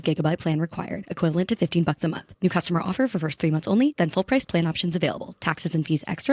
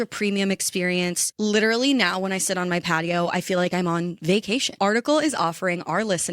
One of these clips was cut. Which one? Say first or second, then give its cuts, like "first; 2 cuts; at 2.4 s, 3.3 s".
second; 1 cut; at 4.7 s